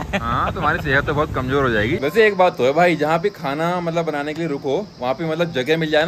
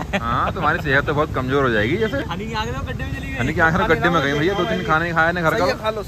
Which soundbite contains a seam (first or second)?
first